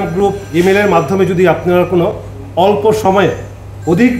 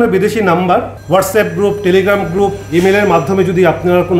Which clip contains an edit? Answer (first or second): second